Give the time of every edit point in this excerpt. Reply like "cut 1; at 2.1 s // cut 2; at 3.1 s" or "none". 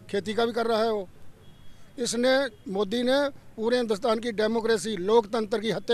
none